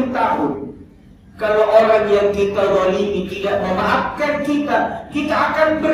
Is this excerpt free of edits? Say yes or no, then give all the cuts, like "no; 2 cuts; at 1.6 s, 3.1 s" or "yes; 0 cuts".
yes; 0 cuts